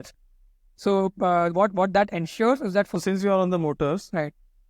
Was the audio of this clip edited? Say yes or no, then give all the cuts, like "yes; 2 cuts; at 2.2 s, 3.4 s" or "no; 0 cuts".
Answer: yes; 1 cut; at 2.9 s